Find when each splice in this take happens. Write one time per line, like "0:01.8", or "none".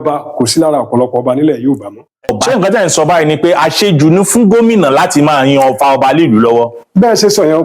0:02.4